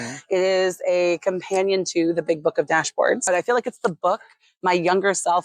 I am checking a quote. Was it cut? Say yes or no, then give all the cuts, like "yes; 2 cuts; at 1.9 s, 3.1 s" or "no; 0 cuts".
yes; 1 cut; at 3.3 s